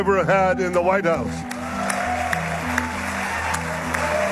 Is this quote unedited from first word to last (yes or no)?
yes